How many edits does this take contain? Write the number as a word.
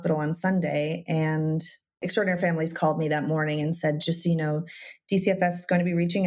one